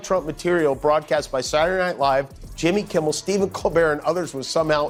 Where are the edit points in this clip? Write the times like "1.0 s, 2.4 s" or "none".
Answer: none